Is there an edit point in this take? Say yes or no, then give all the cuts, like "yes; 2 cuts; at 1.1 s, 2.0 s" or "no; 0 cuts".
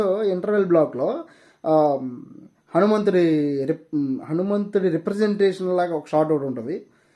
no; 0 cuts